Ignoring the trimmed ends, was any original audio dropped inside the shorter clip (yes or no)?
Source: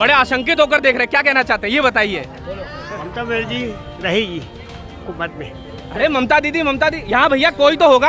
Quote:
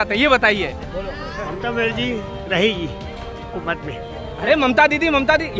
no